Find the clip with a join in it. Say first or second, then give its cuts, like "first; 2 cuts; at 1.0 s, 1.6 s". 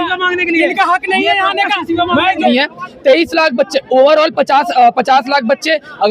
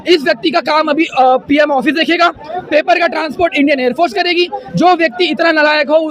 first; 1 cut; at 2.5 s